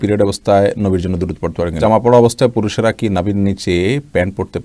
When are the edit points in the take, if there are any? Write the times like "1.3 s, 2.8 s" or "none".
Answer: 1.8 s